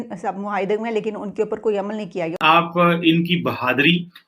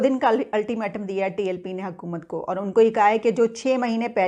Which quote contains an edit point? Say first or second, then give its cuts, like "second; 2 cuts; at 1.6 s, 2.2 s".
first; 1 cut; at 2.3 s